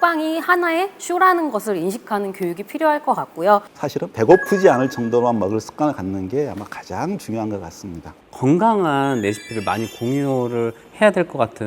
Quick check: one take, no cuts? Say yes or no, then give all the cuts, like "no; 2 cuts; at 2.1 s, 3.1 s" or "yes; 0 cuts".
no; 2 cuts; at 3.7 s, 8.2 s